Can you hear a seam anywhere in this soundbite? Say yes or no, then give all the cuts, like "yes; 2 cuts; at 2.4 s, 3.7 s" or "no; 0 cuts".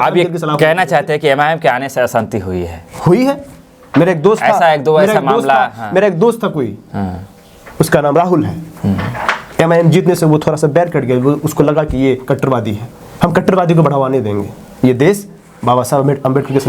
no; 0 cuts